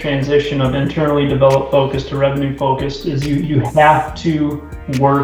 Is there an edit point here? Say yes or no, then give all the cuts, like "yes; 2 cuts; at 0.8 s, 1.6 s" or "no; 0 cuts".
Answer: no; 0 cuts